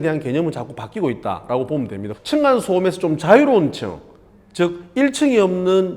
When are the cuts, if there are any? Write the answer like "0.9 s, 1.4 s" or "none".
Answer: 2.0 s